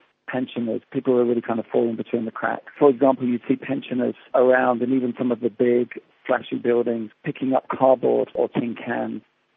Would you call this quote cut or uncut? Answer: cut